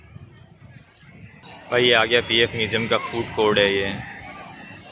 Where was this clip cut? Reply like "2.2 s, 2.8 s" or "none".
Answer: 1.5 s